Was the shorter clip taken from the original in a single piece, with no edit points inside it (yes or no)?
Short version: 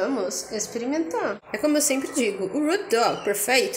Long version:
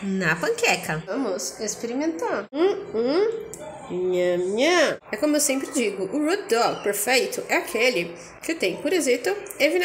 no